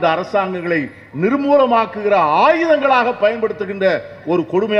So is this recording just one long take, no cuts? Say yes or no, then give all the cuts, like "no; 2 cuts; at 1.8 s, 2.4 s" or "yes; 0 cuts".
yes; 0 cuts